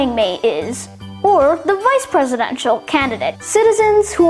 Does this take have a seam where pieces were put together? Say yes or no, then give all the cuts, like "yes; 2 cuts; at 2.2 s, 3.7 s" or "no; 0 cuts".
yes; 1 cut; at 3.4 s